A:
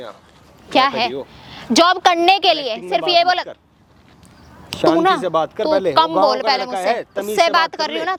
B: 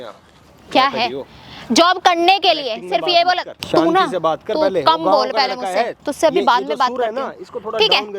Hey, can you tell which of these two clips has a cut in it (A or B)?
B